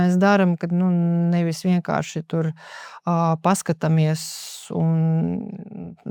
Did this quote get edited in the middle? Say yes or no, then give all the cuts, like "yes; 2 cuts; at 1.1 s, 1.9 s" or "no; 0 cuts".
no; 0 cuts